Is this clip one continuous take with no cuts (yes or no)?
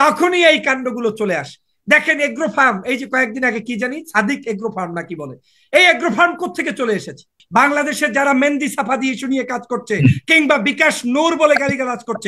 no